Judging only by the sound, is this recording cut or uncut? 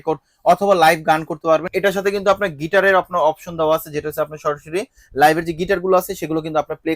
cut